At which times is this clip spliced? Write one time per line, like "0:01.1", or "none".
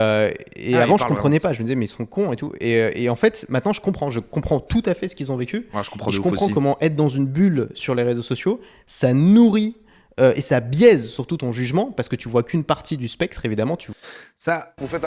none